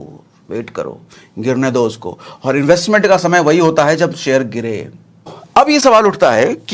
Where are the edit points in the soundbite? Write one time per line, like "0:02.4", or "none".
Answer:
0:05.4